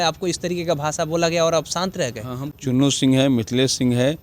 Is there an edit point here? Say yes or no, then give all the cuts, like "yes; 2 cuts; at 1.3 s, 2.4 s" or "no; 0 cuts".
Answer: yes; 1 cut; at 2.4 s